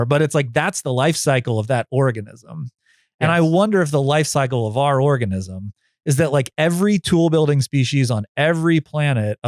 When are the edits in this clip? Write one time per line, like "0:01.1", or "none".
none